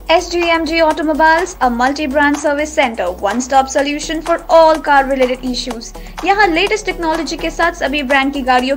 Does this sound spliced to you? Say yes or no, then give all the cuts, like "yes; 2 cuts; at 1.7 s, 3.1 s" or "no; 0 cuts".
no; 0 cuts